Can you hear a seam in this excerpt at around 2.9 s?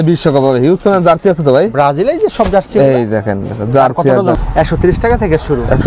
no; 1 cut; at 4.4 s

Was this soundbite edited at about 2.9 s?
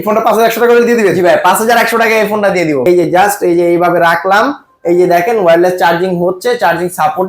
yes; 1 cut; at 2.9 s

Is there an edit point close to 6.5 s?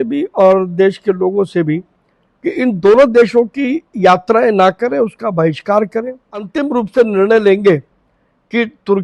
yes; 1 cut; at 6.5 s

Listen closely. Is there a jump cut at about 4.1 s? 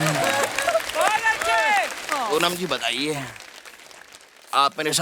no; 1 cut; at 2.0 s

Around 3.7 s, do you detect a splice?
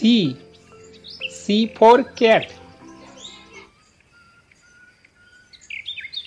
yes; 1 cut; at 3.7 s

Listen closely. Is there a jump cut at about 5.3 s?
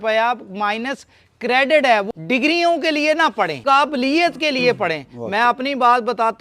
no; 2 cuts; at 2.1 s, 3.6 s

